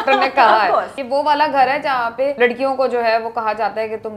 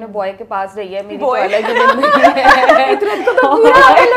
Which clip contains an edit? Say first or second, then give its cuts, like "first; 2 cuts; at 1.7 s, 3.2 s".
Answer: first; 2 cuts; at 1.0 s, 2.3 s